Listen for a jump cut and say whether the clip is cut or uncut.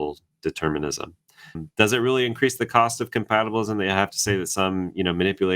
cut